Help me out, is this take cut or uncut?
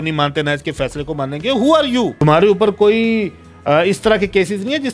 cut